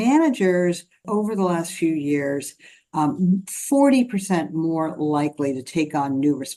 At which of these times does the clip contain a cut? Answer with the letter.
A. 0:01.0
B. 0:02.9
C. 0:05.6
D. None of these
A